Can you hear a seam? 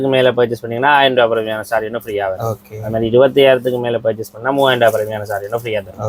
no; 0 cuts

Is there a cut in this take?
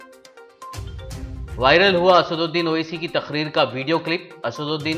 no; 0 cuts

